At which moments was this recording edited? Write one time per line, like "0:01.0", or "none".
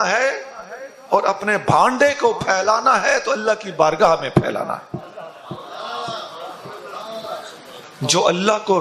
0:07.9